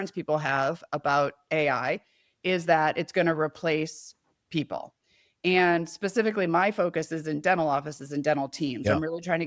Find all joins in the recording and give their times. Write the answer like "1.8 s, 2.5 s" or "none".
1.5 s